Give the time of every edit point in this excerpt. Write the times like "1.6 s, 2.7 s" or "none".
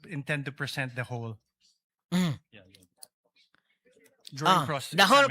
none